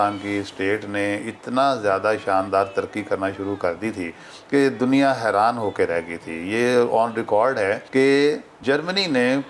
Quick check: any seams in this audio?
no; 0 cuts

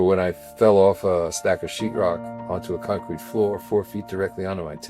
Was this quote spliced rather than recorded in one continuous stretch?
yes; 1 cut; at 1.4 s

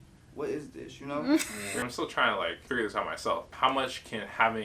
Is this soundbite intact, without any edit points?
no; 3 cuts; at 1.6 s, 2.6 s, 3.5 s

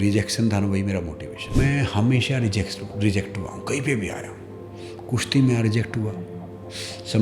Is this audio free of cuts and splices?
no; 1 cut; at 1.6 s

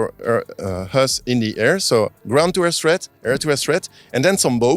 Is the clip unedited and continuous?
yes; 0 cuts

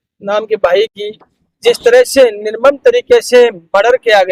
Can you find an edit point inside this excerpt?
no; 0 cuts

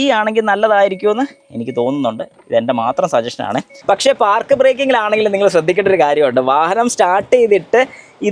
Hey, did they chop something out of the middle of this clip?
yes; 1 cut; at 3.7 s

